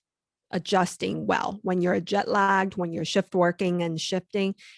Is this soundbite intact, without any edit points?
no; 1 cut; at 3.1 s

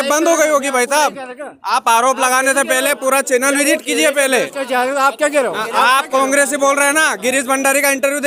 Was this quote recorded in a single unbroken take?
yes; 0 cuts

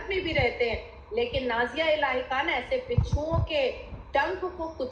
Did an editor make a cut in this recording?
no; 0 cuts

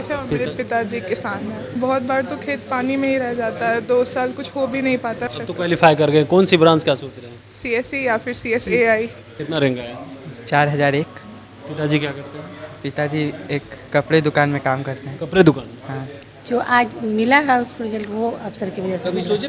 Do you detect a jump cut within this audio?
yes; 4 cuts; at 1.8 s, 5.3 s, 9.3 s, 16.2 s

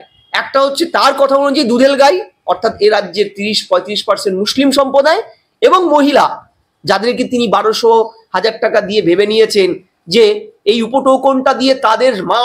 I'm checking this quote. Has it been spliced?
no; 0 cuts

